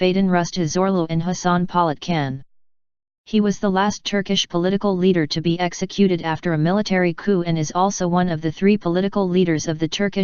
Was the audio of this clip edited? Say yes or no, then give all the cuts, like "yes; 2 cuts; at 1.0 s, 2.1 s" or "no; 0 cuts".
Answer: yes; 1 cut; at 6.1 s